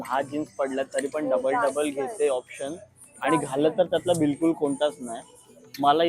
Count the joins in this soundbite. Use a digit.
0